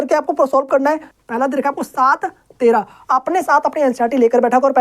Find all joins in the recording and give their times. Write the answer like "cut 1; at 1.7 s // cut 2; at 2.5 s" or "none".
cut 1; at 1.1 s

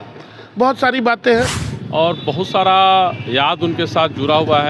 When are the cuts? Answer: cut 1; at 1.5 s

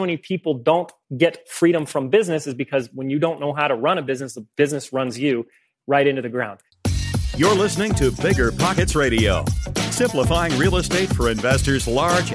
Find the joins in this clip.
cut 1; at 1.0 s // cut 2; at 6.6 s

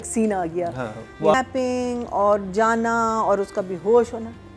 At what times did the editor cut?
cut 1; at 1.3 s

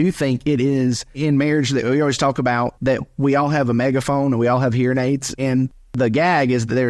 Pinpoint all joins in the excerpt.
cut 1; at 1.2 s // cut 2; at 2.8 s // cut 3; at 5.3 s

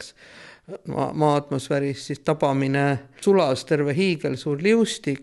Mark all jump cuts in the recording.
cut 1; at 3.1 s

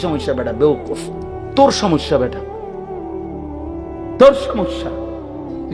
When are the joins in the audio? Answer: cut 1; at 2.3 s // cut 2; at 4.2 s

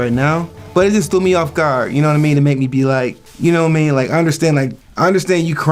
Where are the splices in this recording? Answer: none

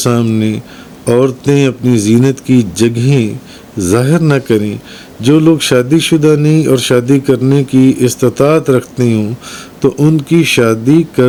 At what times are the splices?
none

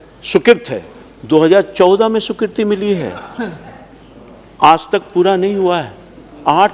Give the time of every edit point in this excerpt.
none

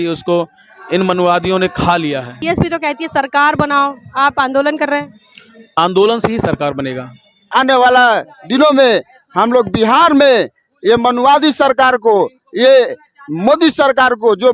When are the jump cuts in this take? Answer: cut 1; at 2.3 s // cut 2; at 7.5 s

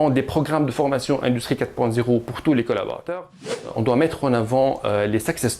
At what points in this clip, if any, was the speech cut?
cut 1; at 3.7 s

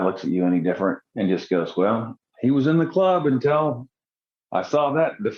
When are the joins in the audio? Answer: none

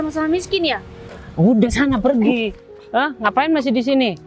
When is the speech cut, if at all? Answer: cut 1; at 1.0 s

